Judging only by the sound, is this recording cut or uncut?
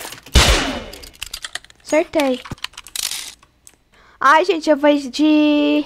cut